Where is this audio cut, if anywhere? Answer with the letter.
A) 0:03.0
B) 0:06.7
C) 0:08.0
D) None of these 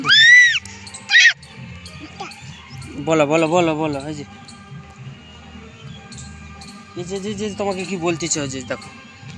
D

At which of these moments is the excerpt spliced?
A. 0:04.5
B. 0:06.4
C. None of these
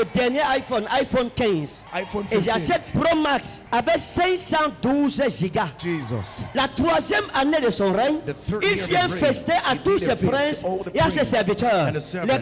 B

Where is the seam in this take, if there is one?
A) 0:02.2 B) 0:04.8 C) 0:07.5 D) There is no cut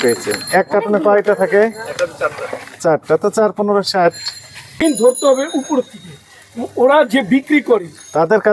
B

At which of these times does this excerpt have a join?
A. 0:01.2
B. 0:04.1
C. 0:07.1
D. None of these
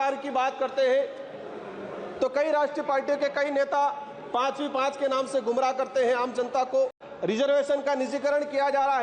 C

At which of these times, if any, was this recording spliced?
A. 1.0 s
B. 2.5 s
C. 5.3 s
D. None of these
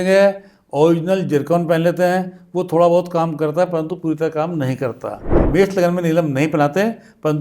C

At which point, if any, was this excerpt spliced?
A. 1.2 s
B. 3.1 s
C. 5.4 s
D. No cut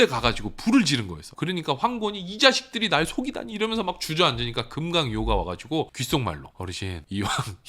A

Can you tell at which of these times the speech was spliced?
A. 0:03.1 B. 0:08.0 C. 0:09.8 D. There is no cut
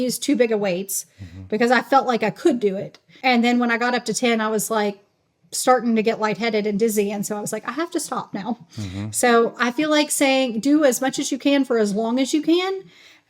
A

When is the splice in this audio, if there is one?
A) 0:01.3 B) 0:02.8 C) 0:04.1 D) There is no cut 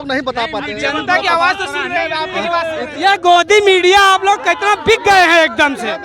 B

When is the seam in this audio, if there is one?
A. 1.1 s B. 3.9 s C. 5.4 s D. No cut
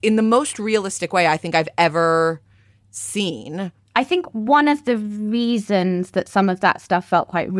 B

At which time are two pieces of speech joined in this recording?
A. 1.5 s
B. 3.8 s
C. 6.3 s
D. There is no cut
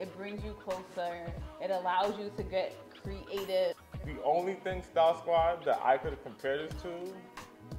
B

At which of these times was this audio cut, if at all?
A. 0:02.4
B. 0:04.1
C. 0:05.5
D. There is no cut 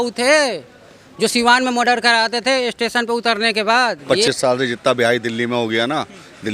B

